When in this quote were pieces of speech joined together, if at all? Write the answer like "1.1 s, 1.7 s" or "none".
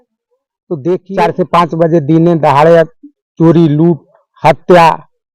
1.1 s